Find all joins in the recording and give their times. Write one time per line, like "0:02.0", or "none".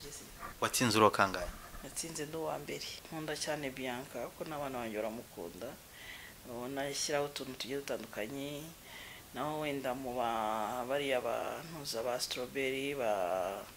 0:03.0